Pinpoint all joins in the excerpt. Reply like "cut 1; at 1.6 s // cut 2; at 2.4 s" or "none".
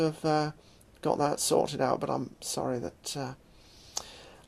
cut 1; at 3.0 s